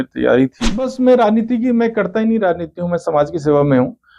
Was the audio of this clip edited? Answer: yes; 1 cut; at 0.9 s

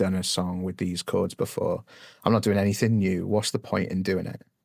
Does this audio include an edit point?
no; 0 cuts

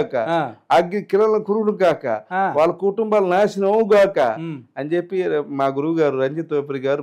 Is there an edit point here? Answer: no; 0 cuts

